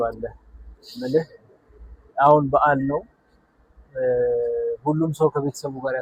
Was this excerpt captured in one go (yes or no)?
yes